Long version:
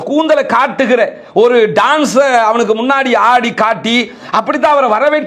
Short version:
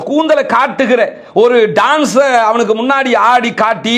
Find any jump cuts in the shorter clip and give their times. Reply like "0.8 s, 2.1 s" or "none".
none